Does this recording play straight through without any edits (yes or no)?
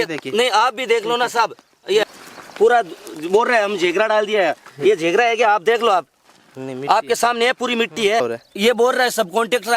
no